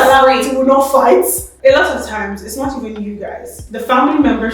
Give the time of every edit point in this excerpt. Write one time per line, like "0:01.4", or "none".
0:01.4